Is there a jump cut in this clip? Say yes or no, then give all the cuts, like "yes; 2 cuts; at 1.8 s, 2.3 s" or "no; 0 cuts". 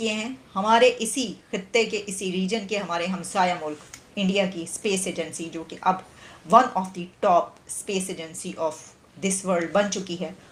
no; 0 cuts